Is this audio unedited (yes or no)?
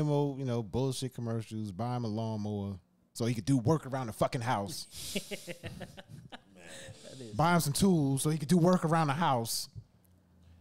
yes